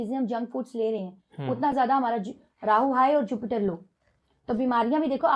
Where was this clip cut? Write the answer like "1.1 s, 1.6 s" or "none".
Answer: none

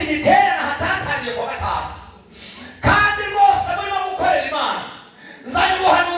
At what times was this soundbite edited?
none

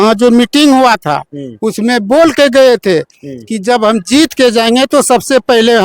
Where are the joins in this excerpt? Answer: none

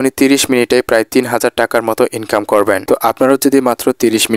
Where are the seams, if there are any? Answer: 2.8 s

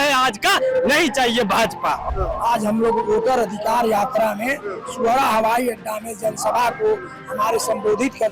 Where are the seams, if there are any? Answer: 2.1 s

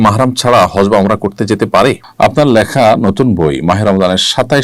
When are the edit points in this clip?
2.0 s

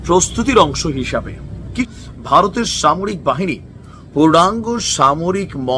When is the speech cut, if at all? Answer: 1.9 s

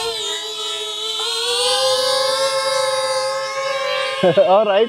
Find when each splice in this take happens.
none

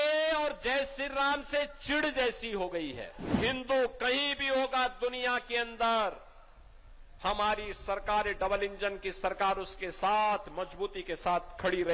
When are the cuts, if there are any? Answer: 3.4 s

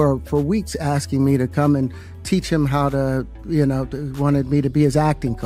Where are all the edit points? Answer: none

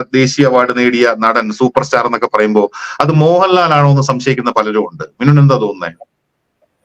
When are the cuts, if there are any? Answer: none

